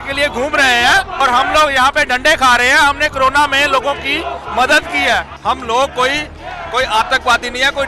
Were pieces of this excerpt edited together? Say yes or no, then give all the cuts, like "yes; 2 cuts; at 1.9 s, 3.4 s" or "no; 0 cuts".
yes; 2 cuts; at 1.2 s, 5.3 s